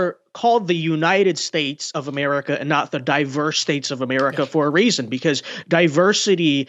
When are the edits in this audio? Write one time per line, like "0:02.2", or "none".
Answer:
none